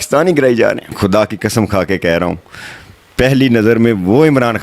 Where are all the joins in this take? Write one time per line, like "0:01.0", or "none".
0:00.9